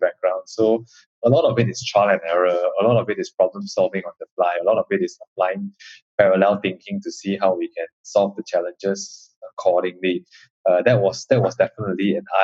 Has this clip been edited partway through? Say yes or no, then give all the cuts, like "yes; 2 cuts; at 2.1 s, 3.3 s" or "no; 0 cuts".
no; 0 cuts